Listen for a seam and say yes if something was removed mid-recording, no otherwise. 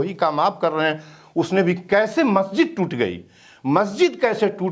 no